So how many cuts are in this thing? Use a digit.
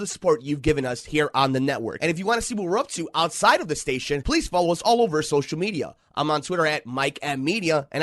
1